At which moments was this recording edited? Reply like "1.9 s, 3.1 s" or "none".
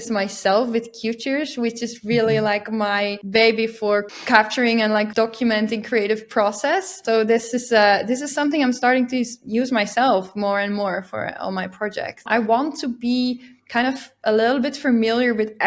3.2 s, 4.2 s, 5.1 s, 7.0 s, 12.3 s

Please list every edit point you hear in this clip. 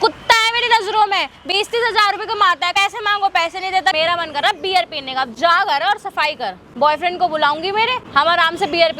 2.7 s, 3.9 s, 6.6 s, 8.0 s

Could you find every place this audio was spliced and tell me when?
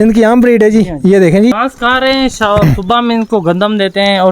1.5 s

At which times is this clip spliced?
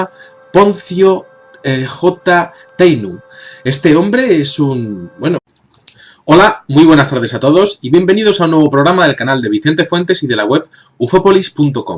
none

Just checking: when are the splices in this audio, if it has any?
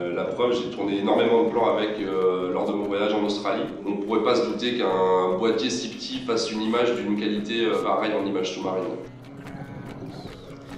none

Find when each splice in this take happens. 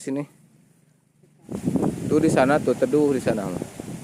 1.5 s

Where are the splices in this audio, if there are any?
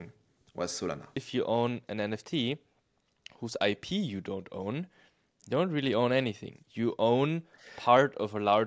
1.2 s

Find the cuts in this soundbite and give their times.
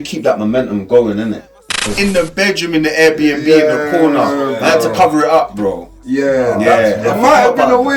1.9 s

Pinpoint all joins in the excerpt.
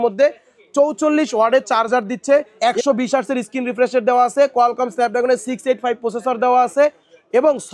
2.5 s

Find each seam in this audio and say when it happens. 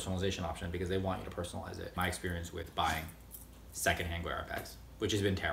1.9 s, 3.6 s

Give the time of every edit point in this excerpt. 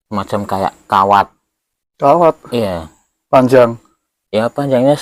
none

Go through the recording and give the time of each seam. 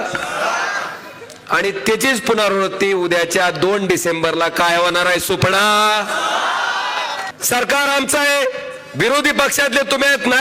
7.2 s

